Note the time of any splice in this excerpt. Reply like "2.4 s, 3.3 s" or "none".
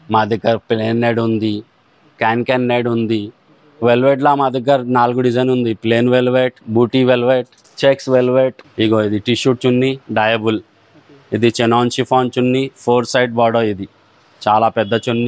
6.6 s, 7.6 s, 8.6 s